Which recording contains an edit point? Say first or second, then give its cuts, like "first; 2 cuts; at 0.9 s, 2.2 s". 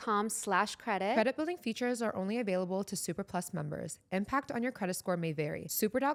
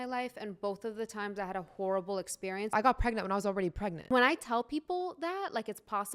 second; 2 cuts; at 2.7 s, 4.1 s